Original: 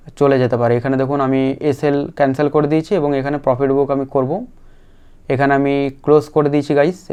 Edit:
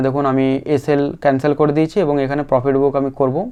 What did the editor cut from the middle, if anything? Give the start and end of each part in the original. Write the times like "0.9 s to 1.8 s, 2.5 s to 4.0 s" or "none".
none